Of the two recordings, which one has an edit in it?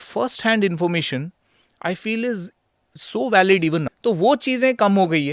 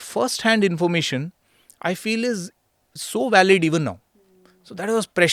first; 1 cut; at 3.9 s

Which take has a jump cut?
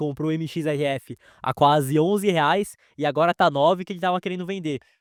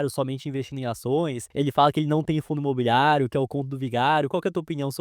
second; 1 cut; at 1.4 s

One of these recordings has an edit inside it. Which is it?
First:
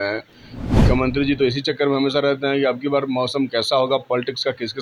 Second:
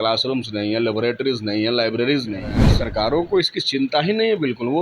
second; 1 cut; at 2.7 s

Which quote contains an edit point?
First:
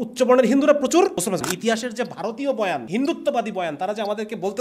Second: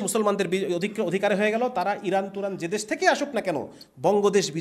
first; 2 cuts; at 1.5 s, 2.8 s

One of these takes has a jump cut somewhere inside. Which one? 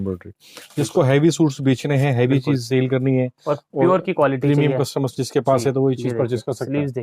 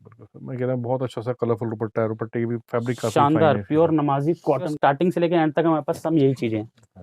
second; 1 cut; at 4.7 s

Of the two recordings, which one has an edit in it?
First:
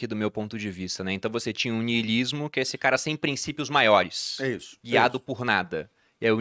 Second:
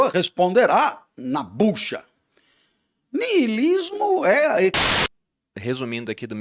second; 1 cut; at 4.8 s

